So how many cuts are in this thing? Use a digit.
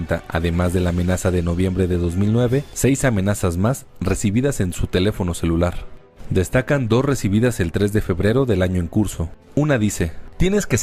0